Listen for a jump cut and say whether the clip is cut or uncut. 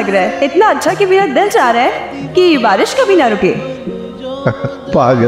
uncut